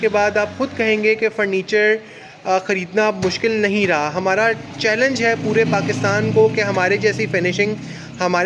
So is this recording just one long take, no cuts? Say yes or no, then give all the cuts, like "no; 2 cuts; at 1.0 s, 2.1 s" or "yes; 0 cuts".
yes; 0 cuts